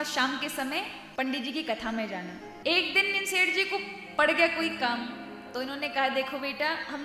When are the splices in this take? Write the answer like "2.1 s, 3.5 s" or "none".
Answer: 1.0 s, 2.5 s